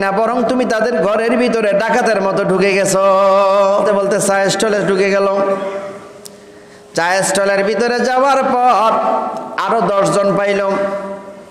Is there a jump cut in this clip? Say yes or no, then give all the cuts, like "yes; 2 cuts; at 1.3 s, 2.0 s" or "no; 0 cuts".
yes; 1 cut; at 3.9 s